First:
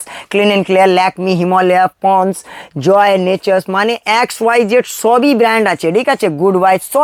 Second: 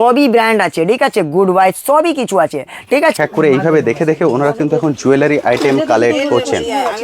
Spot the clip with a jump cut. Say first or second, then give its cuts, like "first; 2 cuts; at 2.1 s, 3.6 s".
second; 1 cut; at 3.1 s